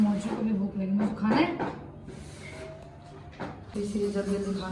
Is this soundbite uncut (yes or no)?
no